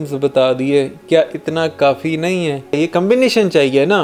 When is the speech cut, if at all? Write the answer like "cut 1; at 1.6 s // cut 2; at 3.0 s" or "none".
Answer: cut 1; at 2.8 s